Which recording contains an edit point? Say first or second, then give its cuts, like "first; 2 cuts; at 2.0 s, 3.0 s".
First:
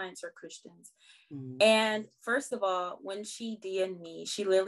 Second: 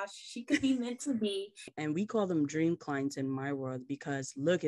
second; 1 cut; at 1.7 s